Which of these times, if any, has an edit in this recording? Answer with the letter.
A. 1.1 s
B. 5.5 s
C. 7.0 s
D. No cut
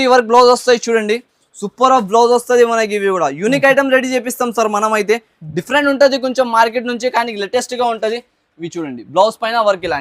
D